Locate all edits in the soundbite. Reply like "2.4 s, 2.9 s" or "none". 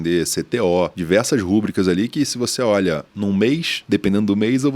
1.0 s, 3.1 s, 3.7 s